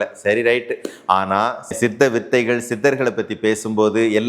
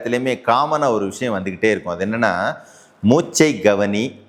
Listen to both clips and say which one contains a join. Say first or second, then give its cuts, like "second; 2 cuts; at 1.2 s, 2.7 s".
first; 1 cut; at 1.8 s